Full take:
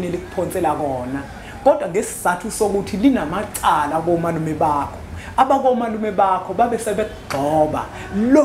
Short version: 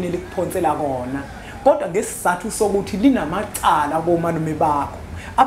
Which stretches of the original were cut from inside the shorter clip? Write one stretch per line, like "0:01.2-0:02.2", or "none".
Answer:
none